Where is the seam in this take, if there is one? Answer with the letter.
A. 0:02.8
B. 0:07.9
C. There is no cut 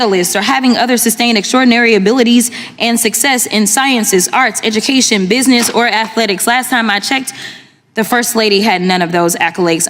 C